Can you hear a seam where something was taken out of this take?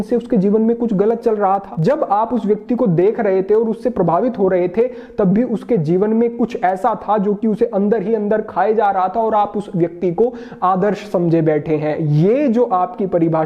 no; 0 cuts

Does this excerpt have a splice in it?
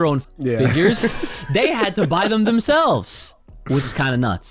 no; 0 cuts

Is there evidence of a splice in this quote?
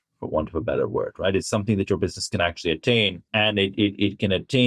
yes; 1 cut; at 3.2 s

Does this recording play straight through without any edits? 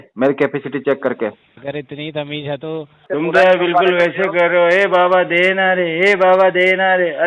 no; 1 cut; at 3.0 s

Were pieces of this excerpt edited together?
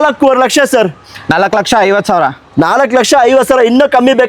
no; 0 cuts

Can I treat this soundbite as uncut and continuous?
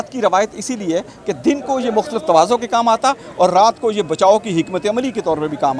yes; 0 cuts

